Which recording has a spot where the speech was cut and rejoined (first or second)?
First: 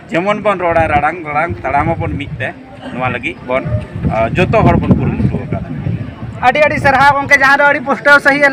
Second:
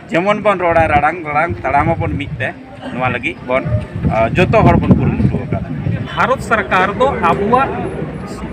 second